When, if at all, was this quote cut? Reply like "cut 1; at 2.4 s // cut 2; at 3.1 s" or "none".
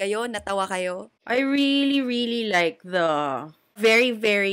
cut 1; at 1.1 s // cut 2; at 3.8 s